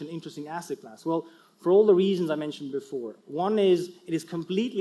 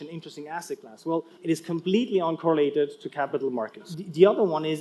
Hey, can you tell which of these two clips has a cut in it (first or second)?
second